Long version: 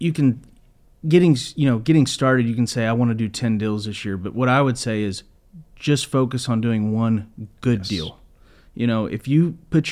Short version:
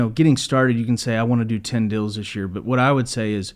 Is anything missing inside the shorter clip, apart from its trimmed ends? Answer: no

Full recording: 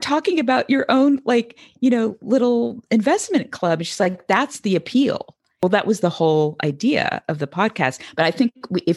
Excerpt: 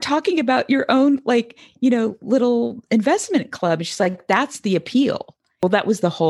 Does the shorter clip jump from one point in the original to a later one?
no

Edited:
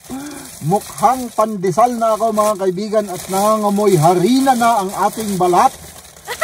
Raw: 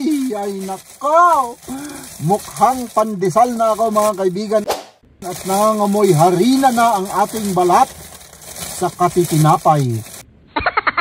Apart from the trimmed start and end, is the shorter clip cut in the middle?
yes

